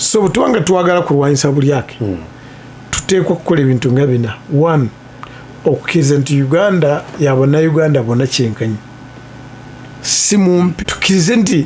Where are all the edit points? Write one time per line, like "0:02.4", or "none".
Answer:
none